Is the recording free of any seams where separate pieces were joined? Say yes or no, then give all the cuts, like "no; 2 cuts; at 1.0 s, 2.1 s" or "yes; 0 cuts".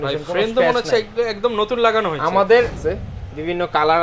no; 1 cut; at 2.8 s